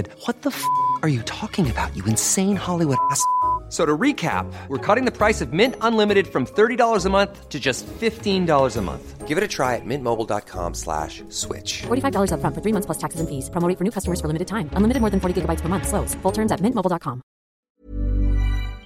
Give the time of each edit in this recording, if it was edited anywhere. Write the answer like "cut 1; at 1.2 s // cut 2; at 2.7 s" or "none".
cut 1; at 17.8 s